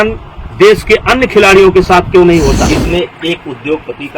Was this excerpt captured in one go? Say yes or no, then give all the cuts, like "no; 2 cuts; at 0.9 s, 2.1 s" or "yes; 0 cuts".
no; 1 cut; at 2.6 s